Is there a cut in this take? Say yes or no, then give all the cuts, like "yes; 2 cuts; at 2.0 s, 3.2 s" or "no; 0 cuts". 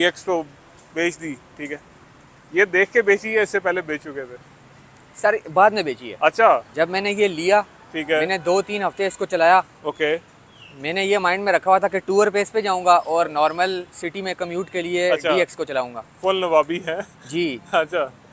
no; 0 cuts